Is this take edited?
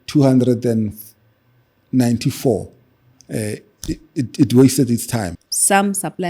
yes; 1 cut; at 5.4 s

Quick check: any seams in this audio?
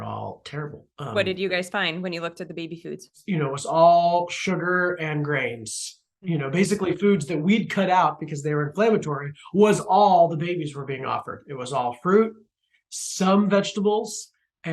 no; 0 cuts

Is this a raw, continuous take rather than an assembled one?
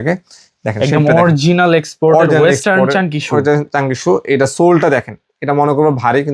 yes; 0 cuts

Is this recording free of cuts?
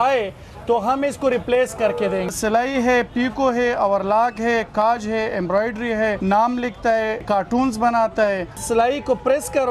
no; 4 cuts; at 2.3 s, 6.2 s, 7.2 s, 8.6 s

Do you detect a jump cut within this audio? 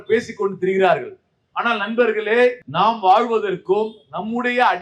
yes; 1 cut; at 2.6 s

